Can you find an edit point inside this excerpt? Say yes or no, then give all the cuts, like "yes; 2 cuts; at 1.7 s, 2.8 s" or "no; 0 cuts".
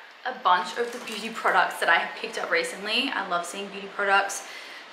no; 0 cuts